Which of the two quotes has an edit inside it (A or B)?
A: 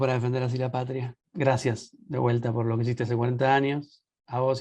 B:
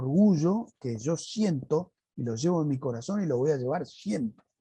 A